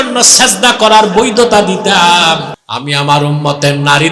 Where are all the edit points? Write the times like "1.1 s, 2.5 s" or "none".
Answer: 2.6 s